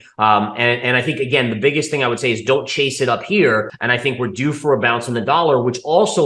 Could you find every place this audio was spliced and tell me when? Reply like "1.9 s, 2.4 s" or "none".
3.8 s